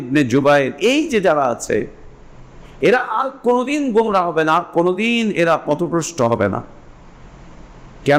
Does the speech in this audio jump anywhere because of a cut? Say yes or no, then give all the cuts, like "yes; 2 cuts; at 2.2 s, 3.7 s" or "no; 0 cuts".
no; 0 cuts